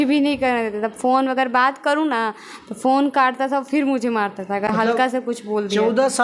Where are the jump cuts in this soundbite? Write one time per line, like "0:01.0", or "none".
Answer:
none

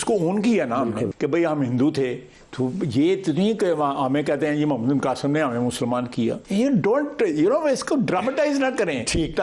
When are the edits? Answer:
0:01.1
0:06.4

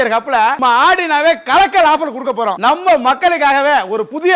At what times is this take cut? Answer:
0:02.6

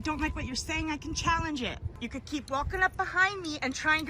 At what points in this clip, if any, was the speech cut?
0:01.9

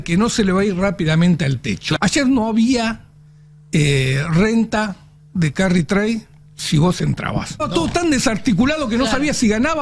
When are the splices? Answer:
0:02.0
0:07.7

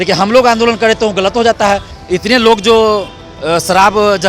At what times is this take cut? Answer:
0:01.9

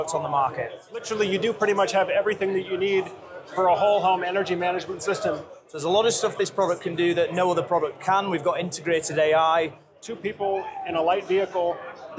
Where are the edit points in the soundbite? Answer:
0:01.0
0:05.6
0:10.0

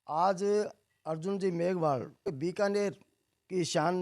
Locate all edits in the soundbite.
0:02.3

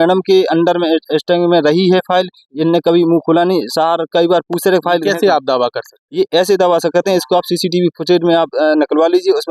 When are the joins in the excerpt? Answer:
none

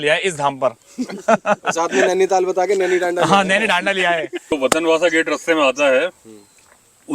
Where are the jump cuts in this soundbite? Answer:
0:04.5

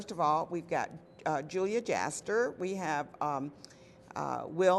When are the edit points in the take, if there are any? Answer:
0:01.5

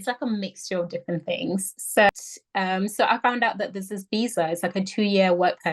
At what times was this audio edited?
0:02.1

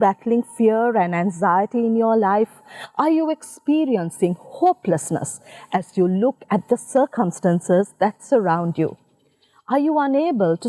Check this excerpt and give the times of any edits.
none

